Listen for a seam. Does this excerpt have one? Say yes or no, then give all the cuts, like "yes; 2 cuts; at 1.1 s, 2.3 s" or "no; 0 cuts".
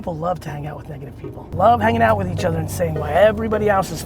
yes; 1 cut; at 1.4 s